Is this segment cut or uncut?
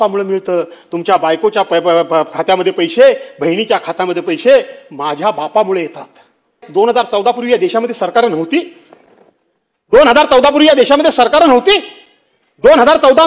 cut